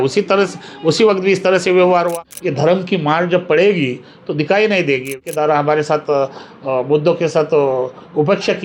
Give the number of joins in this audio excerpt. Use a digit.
2